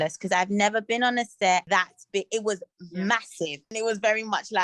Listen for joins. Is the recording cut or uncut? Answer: cut